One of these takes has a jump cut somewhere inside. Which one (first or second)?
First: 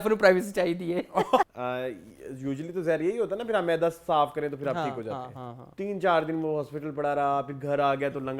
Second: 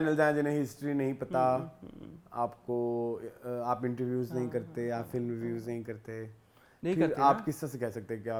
first